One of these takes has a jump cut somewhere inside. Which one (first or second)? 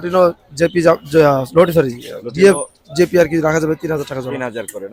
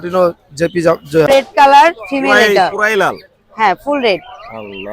second